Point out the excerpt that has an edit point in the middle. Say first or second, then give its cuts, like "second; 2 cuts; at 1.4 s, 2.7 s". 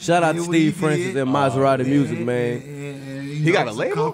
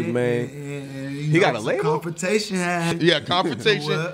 second; 1 cut; at 2.9 s